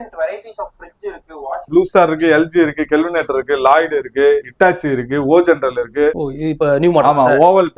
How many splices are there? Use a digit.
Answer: 2